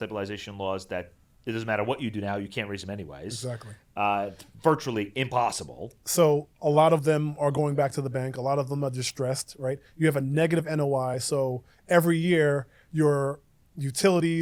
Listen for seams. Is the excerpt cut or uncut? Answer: uncut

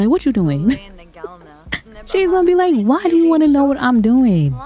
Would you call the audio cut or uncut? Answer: uncut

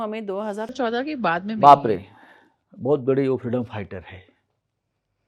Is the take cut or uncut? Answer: uncut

